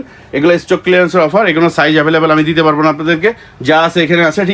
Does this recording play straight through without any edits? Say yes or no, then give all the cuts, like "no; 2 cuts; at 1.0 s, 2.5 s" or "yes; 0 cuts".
yes; 0 cuts